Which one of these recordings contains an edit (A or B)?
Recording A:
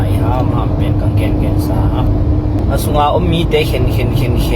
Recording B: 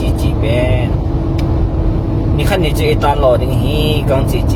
A